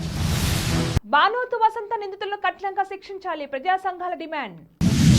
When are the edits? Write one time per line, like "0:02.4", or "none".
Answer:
0:00.9